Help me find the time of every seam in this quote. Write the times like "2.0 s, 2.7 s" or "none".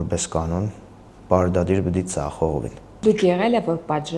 2.8 s